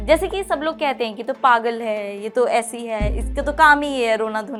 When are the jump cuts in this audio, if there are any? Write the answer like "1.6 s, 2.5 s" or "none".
none